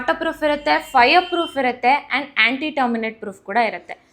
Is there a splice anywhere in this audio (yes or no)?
no